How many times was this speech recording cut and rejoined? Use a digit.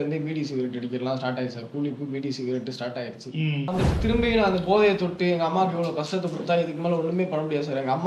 1